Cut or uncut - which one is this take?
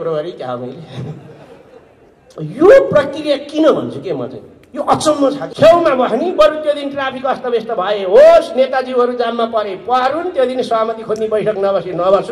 cut